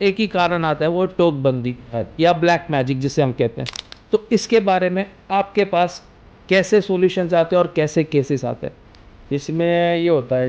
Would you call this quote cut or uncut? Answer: uncut